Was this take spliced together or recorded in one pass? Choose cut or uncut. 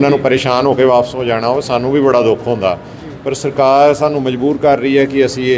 uncut